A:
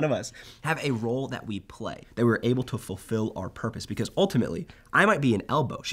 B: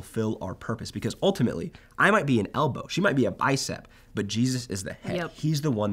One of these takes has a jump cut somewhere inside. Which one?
A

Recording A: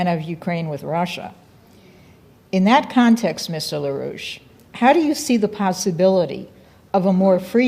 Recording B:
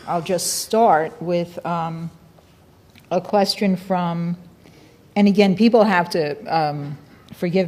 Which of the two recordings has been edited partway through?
A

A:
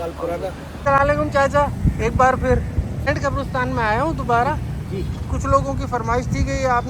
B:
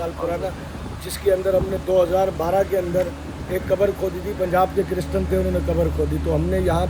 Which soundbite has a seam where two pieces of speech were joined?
A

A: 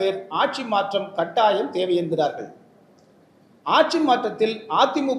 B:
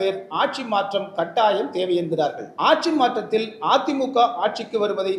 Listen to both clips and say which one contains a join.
B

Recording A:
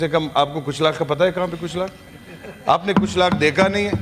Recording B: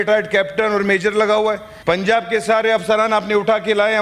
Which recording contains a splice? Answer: B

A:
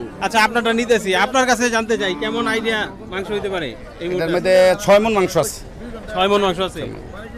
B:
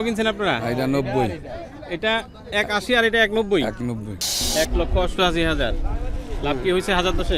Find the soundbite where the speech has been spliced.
B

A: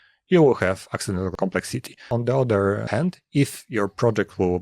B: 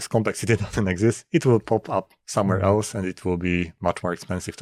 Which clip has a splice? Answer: A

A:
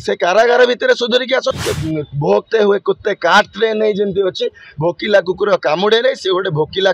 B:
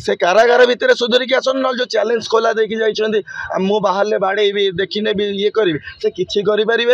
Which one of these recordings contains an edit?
A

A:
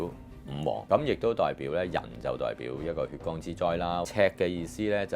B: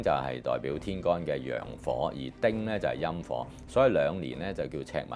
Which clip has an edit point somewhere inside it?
A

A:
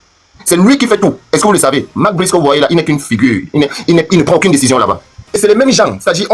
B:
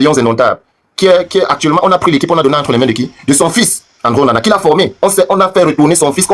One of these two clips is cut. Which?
A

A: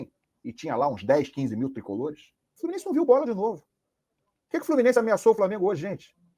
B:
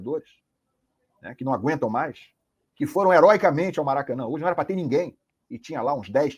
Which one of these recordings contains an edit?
A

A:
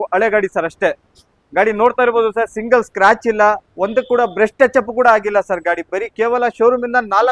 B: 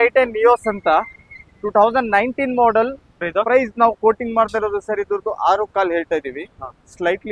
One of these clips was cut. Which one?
B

